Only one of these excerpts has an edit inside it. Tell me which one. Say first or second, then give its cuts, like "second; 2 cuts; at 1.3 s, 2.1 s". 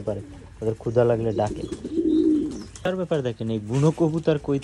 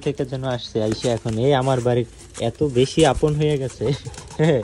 first; 1 cut; at 2.8 s